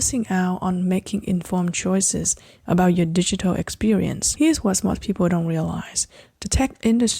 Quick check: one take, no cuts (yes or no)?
no